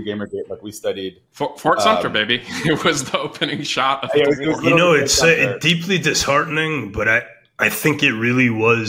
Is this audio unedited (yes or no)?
yes